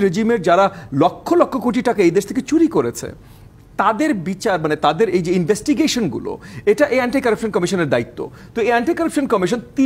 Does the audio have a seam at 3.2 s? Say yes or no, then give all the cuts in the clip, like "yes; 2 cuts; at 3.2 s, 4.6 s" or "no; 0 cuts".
no; 0 cuts